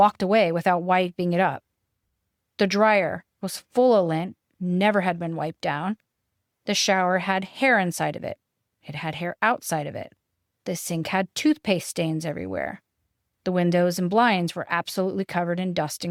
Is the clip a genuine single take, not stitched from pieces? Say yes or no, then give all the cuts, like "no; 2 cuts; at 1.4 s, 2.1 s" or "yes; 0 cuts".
yes; 0 cuts